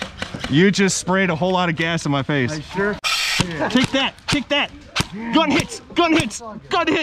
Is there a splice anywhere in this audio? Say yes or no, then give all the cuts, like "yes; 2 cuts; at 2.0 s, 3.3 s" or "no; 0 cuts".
no; 0 cuts